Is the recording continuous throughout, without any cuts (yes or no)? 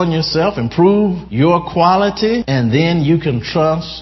no